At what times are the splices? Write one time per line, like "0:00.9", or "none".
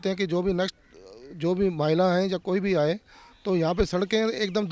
none